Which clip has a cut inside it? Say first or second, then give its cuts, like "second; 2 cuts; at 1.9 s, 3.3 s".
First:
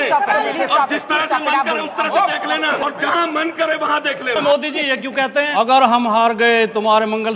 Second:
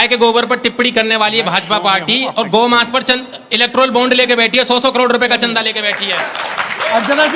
first; 3 cuts; at 2.8 s, 4.4 s, 5.5 s